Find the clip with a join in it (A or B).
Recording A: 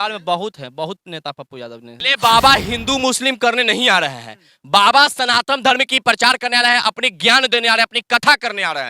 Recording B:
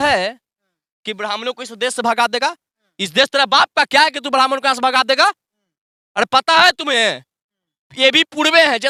A